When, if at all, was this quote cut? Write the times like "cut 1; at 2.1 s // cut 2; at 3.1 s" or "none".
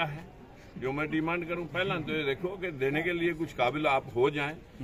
none

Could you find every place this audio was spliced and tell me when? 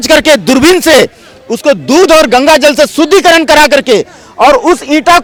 none

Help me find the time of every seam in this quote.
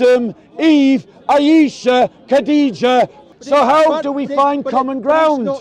cut 1; at 3.2 s

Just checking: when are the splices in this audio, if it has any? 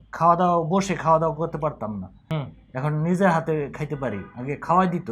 cut 1; at 2.2 s

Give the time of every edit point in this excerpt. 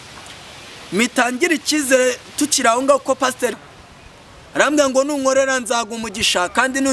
cut 1; at 3.6 s

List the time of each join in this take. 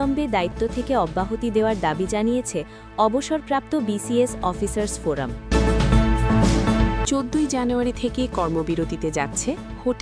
cut 1; at 5.4 s // cut 2; at 7.0 s

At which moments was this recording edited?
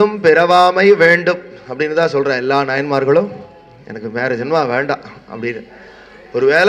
none

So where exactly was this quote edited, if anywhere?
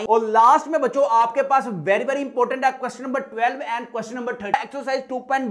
cut 1; at 4.5 s

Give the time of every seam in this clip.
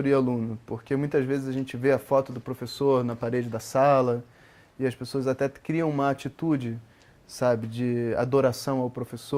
none

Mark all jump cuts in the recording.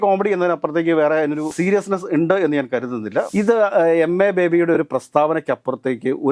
cut 1; at 1.5 s // cut 2; at 3.3 s

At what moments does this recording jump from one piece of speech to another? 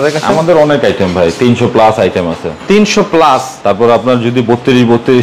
none

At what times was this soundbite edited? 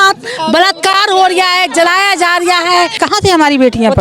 cut 1; at 3.0 s

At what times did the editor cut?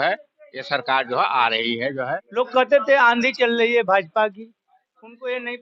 cut 1; at 2.3 s

